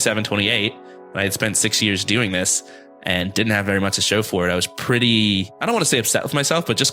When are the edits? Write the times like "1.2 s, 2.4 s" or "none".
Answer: 5.5 s